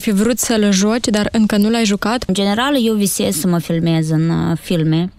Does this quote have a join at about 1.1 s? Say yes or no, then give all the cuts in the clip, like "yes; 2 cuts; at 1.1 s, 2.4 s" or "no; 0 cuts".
no; 1 cut; at 2.3 s